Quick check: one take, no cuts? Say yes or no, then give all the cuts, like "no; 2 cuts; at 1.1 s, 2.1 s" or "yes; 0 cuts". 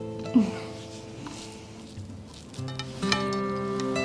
yes; 0 cuts